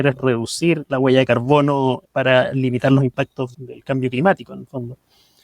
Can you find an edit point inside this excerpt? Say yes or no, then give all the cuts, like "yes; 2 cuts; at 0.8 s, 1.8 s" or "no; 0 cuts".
yes; 2 cuts; at 2.0 s, 3.5 s